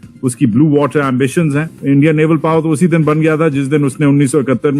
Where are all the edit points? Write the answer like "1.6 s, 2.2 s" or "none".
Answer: 1.7 s